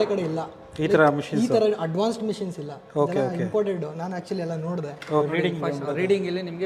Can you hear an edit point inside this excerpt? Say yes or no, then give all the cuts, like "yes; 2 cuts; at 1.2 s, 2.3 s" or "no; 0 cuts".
yes; 1 cut; at 5.2 s